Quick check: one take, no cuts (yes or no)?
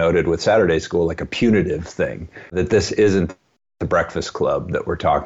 no